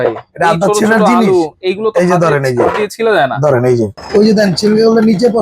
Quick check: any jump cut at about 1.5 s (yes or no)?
no